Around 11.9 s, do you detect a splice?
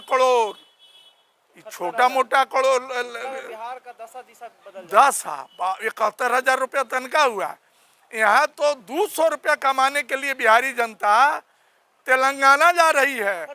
no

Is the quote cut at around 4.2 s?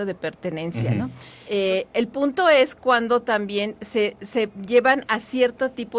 no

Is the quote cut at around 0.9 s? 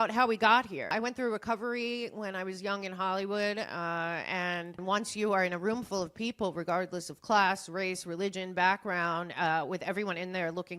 yes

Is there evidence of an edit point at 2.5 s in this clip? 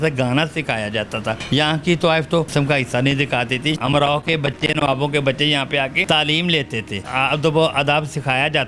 yes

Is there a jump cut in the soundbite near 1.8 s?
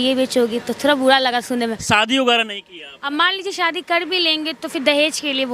yes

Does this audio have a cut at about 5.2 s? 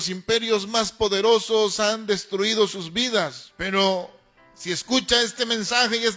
no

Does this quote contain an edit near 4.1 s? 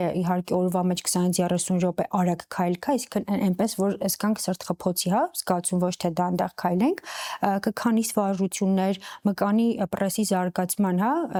no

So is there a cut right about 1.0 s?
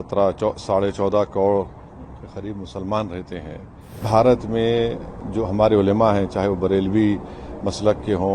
no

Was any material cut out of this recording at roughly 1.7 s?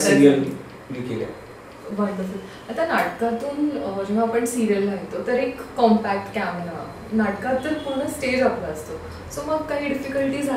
no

